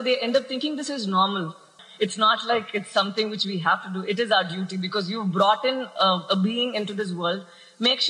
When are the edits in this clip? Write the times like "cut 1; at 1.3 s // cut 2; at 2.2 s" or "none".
cut 1; at 1.8 s